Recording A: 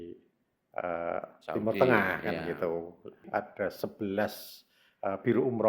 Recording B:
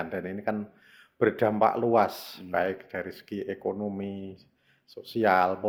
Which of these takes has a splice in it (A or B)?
A